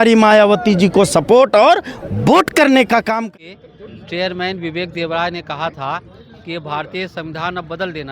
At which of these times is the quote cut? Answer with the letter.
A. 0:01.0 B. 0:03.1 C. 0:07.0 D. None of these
B